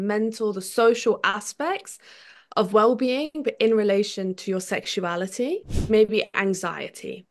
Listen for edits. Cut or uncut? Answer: cut